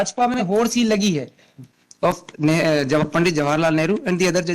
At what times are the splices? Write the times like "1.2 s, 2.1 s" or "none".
1.6 s